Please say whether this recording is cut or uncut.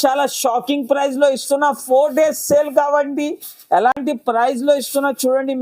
uncut